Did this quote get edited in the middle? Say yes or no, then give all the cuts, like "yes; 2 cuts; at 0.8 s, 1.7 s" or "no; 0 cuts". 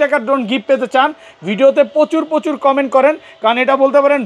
no; 0 cuts